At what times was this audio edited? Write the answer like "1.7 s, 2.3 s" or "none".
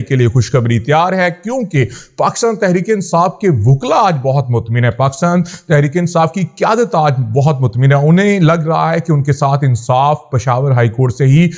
none